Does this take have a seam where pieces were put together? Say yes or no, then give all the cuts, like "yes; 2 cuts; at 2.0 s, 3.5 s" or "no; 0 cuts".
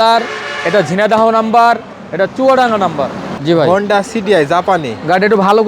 yes; 1 cut; at 3.2 s